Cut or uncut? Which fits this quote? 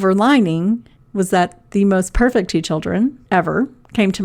cut